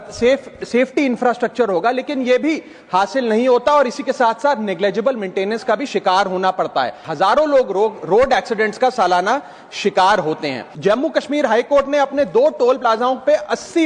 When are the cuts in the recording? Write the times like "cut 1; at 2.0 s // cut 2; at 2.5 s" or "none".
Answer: cut 1; at 7.1 s // cut 2; at 10.6 s